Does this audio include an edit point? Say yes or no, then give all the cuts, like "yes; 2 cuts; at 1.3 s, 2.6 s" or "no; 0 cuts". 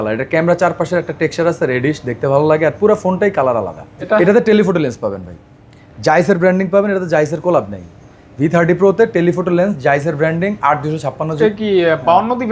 yes; 2 cuts; at 4.0 s, 11.3 s